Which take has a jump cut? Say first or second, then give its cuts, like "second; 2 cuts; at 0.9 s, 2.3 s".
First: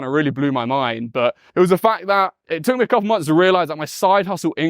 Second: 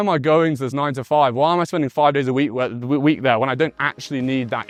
first; 2 cuts; at 1.4 s, 2.4 s